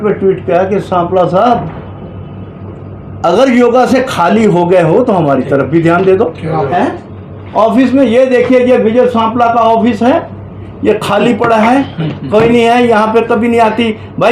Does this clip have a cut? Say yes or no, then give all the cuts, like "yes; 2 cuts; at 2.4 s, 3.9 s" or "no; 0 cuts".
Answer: yes; 1 cut; at 6.7 s